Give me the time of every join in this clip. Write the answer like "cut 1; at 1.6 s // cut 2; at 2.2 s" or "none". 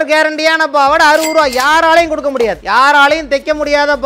cut 1; at 2.6 s